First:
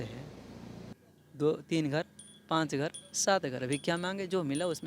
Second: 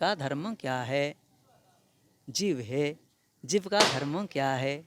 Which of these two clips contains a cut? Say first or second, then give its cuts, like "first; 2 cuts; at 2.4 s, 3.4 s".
first; 1 cut; at 0.9 s